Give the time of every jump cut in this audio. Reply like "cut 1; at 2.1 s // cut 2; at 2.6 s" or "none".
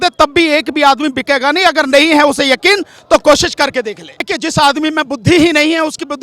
cut 1; at 4.3 s